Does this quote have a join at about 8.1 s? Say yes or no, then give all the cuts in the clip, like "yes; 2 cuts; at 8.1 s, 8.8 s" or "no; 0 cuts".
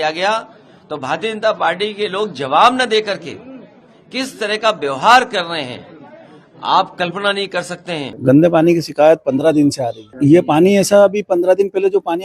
yes; 1 cut; at 8.1 s